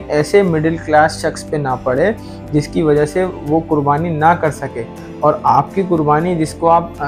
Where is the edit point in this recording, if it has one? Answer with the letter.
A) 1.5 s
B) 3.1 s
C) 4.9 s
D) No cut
D